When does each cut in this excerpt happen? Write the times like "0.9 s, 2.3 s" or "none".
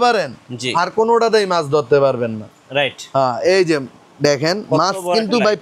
none